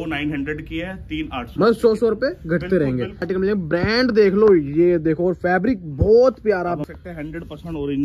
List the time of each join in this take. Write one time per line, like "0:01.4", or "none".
0:03.2
0:06.8

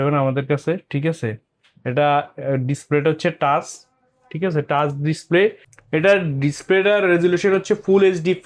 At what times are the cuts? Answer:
none

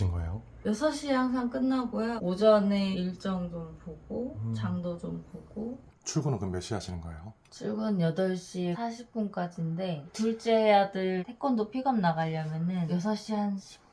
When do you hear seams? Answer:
0:05.9

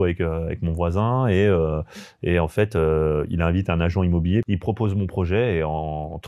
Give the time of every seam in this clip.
0:04.5

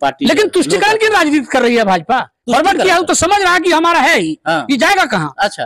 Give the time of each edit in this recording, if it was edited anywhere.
none

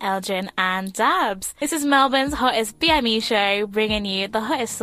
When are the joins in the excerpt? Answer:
0:01.5

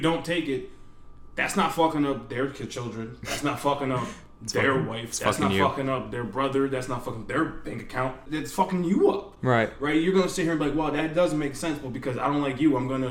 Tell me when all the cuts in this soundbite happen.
0:08.2

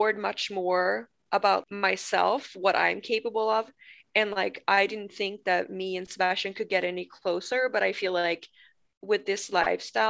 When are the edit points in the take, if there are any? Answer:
0:01.6

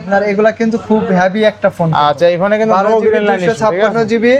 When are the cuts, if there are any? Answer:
none

